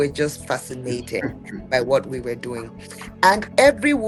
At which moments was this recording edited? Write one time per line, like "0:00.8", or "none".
none